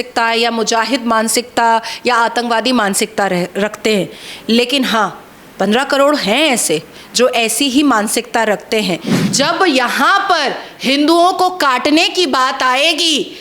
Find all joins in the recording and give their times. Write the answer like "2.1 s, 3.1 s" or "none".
9.2 s